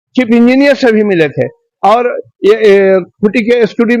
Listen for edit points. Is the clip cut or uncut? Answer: uncut